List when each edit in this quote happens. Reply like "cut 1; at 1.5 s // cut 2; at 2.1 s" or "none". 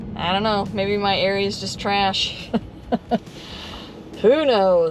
none